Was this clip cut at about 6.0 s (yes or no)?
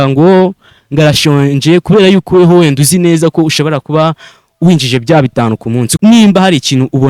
yes